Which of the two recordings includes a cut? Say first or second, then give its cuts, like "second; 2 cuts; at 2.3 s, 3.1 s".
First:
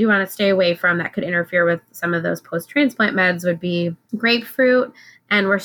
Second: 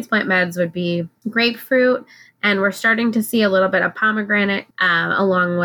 second; 1 cut; at 4.7 s